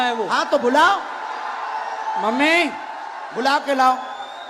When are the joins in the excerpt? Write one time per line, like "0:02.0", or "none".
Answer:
none